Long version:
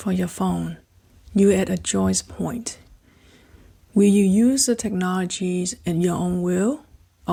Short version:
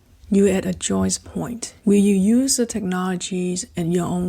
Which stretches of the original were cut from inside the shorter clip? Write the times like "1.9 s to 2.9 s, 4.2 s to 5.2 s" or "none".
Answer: 2.7 s to 3.7 s